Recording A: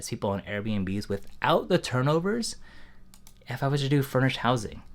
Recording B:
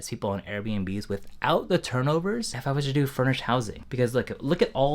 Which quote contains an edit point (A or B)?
B